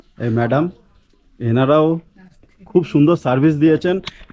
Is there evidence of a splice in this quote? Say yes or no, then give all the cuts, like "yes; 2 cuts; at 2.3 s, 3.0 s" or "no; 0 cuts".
no; 0 cuts